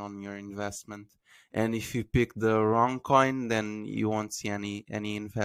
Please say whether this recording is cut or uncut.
uncut